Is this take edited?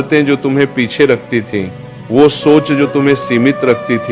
no; 0 cuts

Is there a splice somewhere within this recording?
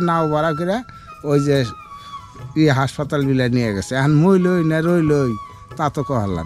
no; 0 cuts

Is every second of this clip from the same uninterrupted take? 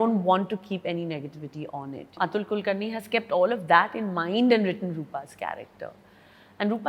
no; 1 cut; at 2.2 s

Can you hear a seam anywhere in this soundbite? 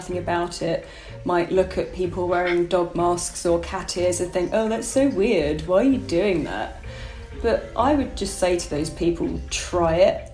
no; 0 cuts

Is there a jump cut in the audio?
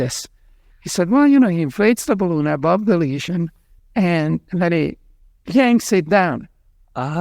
no; 0 cuts

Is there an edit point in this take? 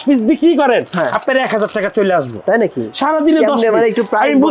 no; 0 cuts

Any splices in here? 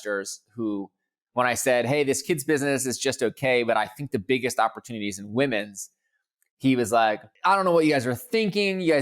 yes; 1 cut; at 7.3 s

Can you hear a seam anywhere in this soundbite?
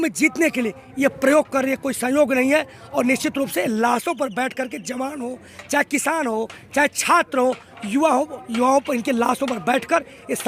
no; 0 cuts

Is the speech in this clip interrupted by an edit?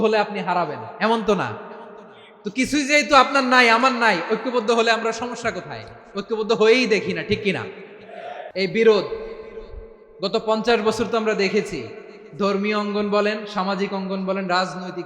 yes; 1 cut; at 8.4 s

